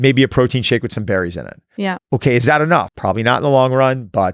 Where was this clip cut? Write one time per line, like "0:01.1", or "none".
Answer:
0:02.0
0:02.9